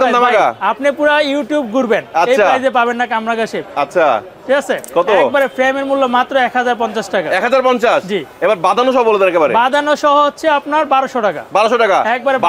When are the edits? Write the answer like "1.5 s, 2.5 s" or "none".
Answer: none